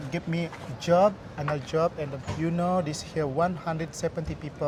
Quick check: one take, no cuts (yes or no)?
yes